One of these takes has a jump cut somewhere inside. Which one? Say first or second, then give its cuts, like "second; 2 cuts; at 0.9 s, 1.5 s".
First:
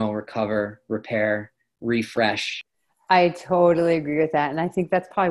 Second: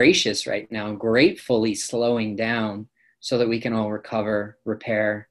first; 1 cut; at 2.5 s